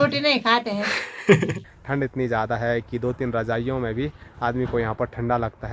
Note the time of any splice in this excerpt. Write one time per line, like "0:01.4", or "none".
0:01.6